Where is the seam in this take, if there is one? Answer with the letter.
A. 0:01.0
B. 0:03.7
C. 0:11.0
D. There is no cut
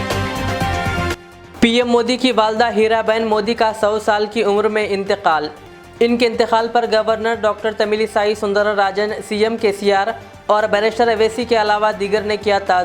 A